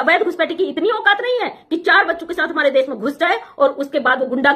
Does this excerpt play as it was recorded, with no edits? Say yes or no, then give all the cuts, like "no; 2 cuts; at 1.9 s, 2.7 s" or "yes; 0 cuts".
yes; 0 cuts